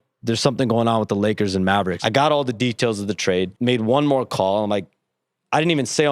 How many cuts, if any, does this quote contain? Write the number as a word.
two